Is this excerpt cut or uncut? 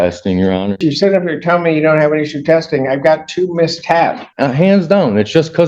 cut